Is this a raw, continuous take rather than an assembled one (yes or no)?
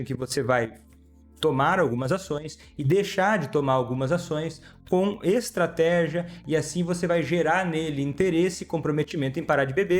yes